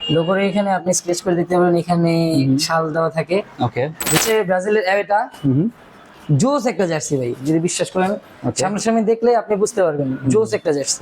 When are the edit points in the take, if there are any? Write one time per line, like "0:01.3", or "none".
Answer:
0:04.2